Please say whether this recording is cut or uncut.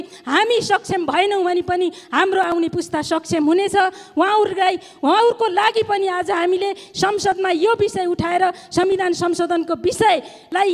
uncut